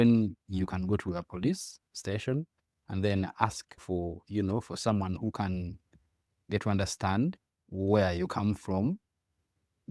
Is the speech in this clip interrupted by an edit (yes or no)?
no